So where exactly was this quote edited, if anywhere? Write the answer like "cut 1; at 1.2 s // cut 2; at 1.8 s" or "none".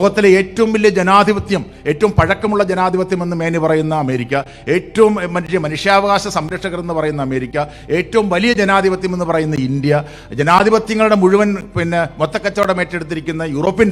none